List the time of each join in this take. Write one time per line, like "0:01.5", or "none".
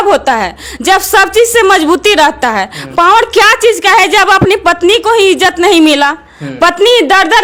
none